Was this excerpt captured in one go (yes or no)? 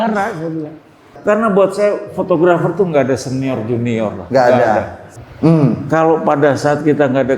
no